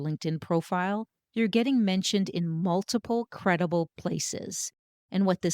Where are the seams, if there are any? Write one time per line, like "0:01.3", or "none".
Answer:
0:01.2
0:03.9